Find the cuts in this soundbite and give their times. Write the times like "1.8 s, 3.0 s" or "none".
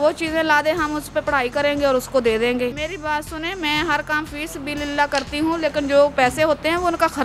2.7 s, 6.1 s